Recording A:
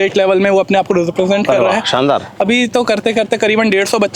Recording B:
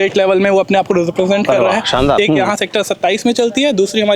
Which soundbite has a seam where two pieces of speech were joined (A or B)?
B